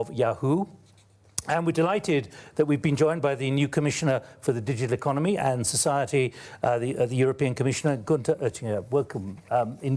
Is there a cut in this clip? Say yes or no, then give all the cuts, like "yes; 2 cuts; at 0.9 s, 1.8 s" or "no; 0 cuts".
yes; 1 cut; at 6.3 s